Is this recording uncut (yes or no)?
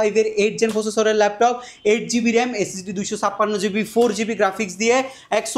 yes